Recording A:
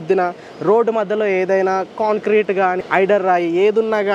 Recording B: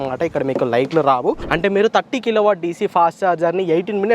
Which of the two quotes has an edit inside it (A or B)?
B